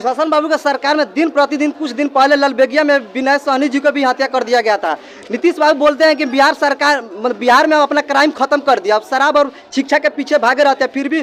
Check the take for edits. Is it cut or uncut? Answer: uncut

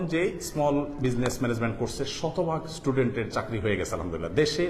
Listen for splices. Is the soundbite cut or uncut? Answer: uncut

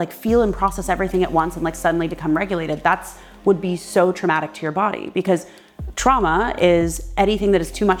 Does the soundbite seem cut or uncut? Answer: uncut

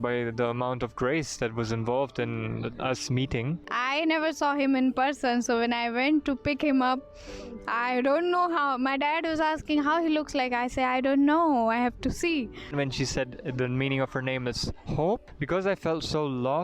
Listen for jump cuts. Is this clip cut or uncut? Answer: cut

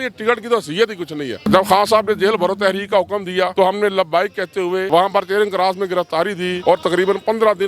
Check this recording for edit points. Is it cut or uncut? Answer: cut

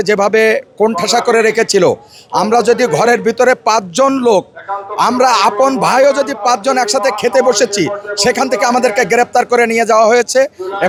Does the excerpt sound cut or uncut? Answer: uncut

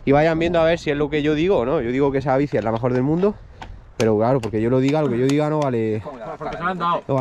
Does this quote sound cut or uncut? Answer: uncut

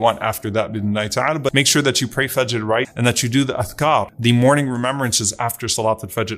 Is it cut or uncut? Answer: cut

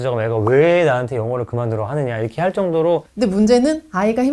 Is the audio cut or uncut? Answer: cut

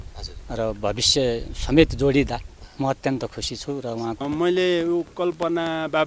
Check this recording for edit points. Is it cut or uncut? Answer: cut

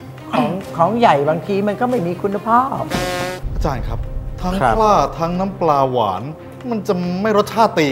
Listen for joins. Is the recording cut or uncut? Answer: cut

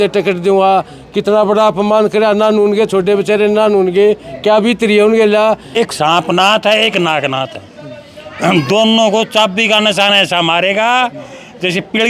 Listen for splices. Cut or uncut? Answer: cut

